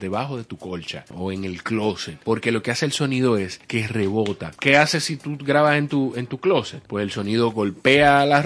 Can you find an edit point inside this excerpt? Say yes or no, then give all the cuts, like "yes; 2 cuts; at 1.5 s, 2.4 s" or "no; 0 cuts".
yes; 5 cuts; at 1.1 s, 2.1 s, 3.6 s, 4.5 s, 6.8 s